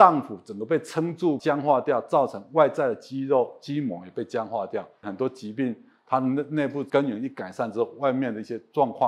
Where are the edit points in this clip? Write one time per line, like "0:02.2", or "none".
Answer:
0:01.4
0:05.1
0:06.9